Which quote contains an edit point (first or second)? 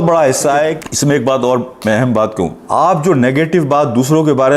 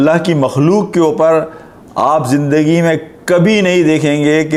first